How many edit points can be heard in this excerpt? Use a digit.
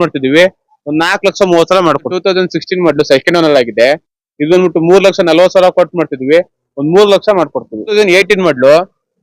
2